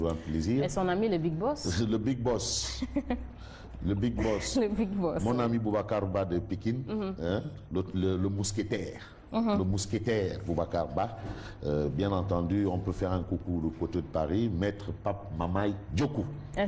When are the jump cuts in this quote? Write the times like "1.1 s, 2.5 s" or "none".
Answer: 4.4 s